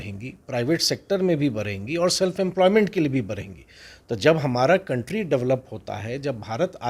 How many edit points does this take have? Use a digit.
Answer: 0